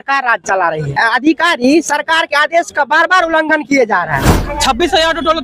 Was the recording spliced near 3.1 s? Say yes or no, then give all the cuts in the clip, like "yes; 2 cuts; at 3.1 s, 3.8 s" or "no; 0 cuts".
no; 2 cuts; at 0.9 s, 4.4 s